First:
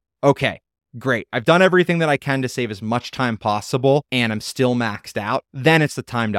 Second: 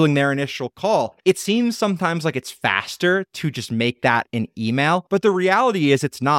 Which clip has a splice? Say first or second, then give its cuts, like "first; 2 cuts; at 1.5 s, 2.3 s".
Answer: first; 2 cuts; at 4.1 s, 5.5 s